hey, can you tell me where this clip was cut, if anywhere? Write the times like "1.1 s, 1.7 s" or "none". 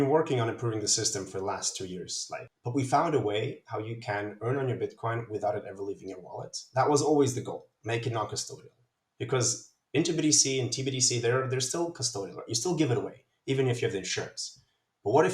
2.5 s